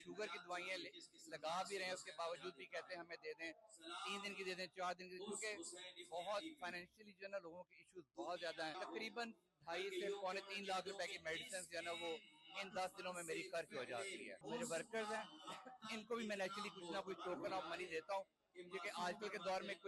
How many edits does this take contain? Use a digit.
2